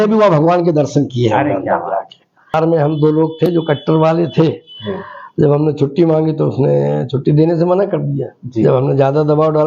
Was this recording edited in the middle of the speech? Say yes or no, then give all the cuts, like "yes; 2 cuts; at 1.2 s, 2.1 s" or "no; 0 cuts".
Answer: yes; 1 cut; at 2.6 s